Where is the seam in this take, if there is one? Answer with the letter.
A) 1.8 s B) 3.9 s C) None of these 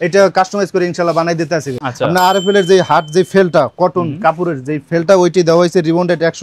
A